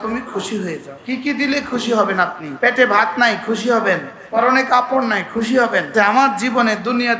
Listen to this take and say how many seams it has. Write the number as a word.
four